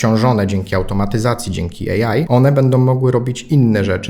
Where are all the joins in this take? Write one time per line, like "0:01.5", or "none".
0:02.3